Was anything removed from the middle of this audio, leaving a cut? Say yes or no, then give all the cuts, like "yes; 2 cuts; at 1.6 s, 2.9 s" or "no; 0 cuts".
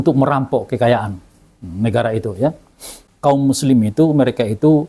yes; 1 cut; at 3.0 s